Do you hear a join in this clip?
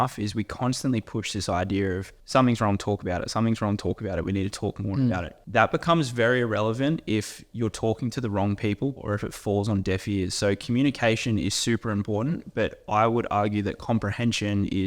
yes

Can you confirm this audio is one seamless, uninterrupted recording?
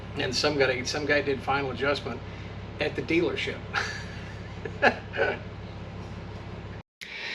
yes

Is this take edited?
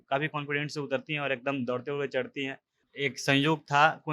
yes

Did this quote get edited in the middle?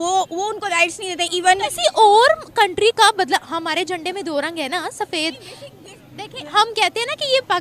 yes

